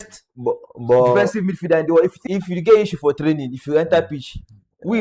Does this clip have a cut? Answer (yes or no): yes